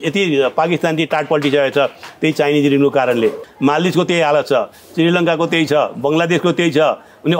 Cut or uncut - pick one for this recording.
cut